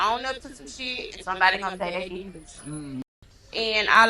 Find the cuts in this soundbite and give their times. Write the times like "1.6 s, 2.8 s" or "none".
3.1 s